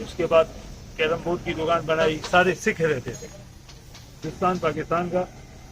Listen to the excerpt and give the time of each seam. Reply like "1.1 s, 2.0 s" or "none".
2.2 s, 4.2 s